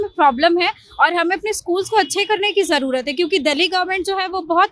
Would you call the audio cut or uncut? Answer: uncut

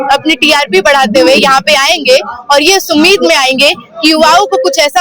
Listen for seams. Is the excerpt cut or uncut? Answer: uncut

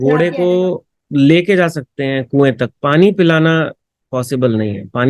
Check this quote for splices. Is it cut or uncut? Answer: cut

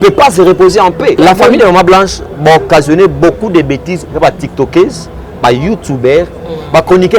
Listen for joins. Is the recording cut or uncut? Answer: cut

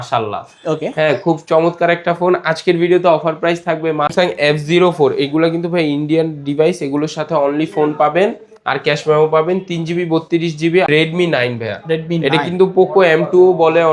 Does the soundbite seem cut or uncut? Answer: cut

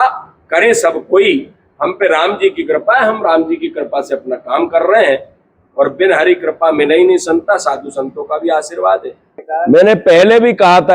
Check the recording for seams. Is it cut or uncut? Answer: cut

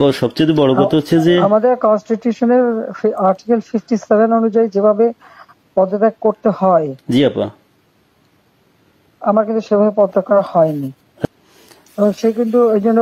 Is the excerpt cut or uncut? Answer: cut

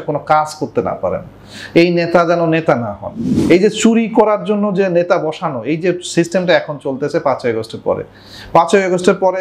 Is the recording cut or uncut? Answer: cut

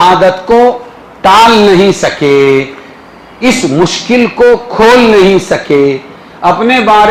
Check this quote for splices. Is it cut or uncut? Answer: uncut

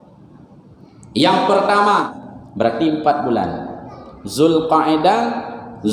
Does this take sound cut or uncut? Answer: cut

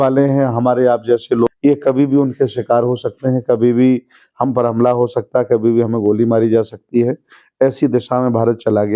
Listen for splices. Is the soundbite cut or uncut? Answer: cut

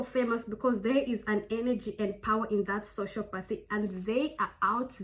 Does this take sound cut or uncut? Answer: uncut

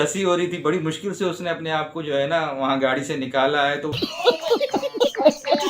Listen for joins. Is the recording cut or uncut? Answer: cut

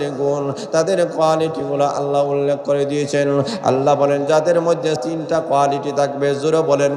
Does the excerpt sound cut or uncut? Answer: cut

